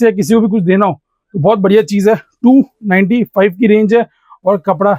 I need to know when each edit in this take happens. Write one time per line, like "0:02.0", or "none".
none